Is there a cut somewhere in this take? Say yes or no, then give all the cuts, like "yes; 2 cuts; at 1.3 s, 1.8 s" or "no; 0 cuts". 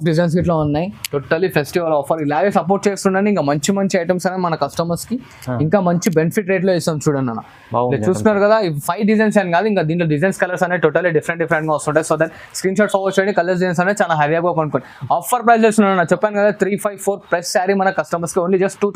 no; 0 cuts